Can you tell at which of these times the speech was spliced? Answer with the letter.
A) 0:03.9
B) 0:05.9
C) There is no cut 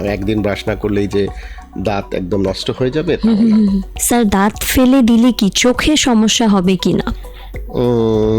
A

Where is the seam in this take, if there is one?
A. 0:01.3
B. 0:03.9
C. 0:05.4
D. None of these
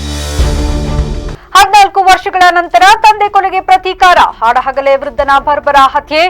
A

